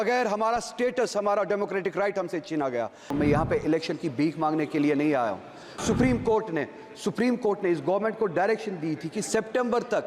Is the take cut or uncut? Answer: cut